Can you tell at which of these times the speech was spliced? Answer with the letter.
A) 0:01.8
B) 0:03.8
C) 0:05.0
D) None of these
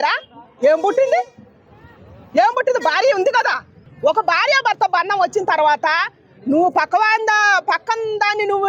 B